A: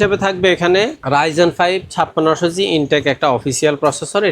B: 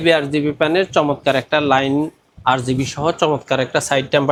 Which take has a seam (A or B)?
A